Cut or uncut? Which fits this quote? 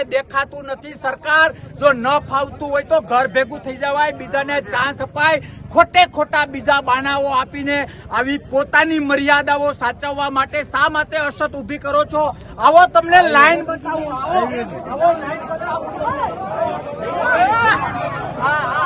uncut